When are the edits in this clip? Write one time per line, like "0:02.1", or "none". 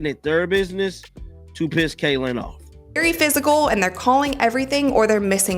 0:03.0